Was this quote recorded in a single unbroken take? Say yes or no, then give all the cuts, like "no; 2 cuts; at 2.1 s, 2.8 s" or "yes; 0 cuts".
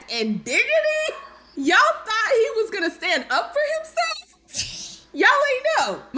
yes; 0 cuts